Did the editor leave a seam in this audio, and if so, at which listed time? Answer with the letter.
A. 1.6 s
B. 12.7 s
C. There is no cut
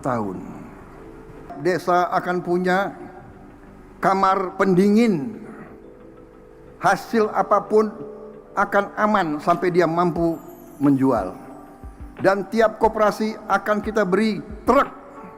A